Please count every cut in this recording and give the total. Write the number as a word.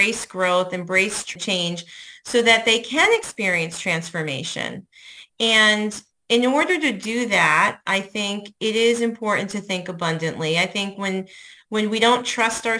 one